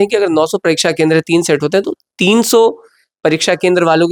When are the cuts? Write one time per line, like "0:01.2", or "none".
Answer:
none